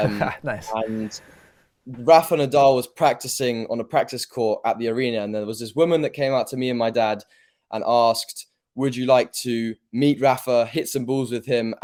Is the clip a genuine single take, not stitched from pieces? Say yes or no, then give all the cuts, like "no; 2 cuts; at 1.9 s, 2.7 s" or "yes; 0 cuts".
yes; 0 cuts